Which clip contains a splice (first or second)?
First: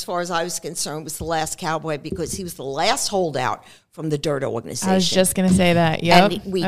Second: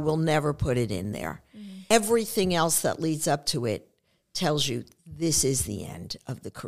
second